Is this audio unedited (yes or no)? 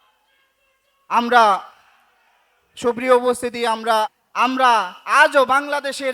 no